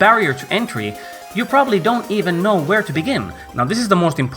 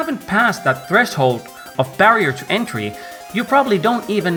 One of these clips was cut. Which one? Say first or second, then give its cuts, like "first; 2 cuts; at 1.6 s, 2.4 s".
first; 1 cut; at 3.4 s